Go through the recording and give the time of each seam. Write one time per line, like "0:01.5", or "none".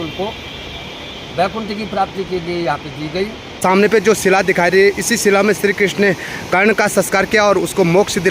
0:03.4